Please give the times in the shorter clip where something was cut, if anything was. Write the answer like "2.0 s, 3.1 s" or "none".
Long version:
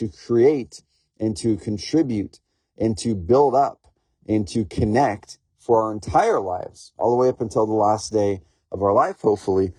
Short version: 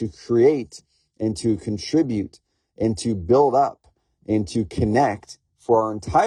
none